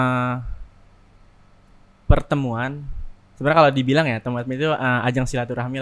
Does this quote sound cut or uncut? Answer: uncut